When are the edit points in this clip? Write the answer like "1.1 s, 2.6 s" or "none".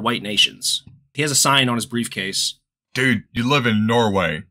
1.1 s, 3.3 s